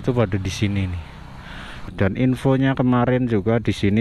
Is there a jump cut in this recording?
yes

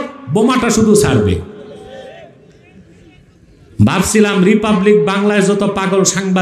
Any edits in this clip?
no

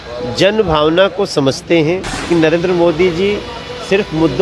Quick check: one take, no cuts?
no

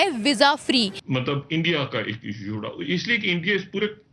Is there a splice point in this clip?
yes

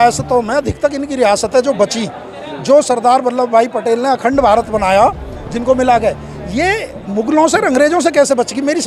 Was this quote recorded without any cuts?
yes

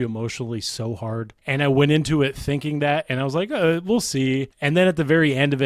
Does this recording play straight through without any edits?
no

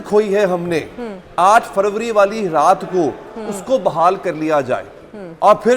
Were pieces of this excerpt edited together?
no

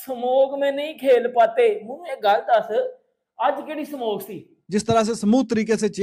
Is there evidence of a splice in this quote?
yes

